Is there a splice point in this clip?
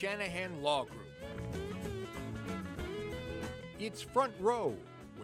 yes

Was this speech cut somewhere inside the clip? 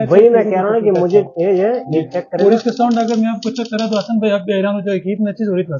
no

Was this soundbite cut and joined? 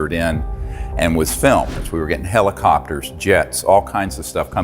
yes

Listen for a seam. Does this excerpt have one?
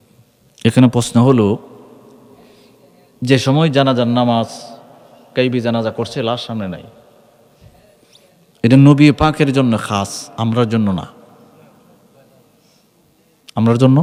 no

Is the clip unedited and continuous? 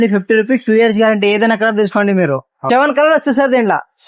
no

